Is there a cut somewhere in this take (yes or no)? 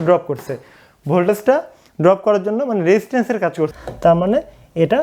yes